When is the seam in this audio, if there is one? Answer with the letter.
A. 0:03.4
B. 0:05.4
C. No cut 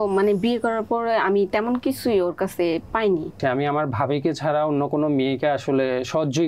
A